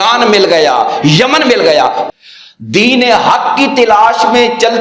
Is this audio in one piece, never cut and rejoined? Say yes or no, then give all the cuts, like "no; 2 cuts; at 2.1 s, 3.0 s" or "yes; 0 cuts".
no; 1 cut; at 2.1 s